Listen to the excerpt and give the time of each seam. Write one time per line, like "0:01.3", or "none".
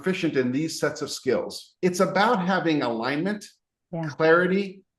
0:01.7